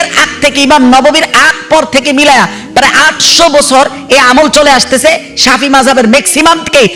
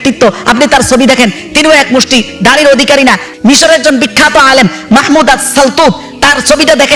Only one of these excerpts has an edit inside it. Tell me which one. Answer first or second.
second